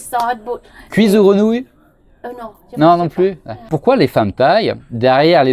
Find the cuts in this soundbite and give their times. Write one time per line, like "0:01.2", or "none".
0:03.7